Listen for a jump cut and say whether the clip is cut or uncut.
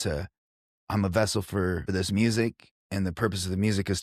cut